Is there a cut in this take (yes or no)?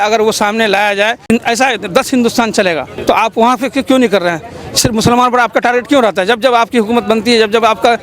yes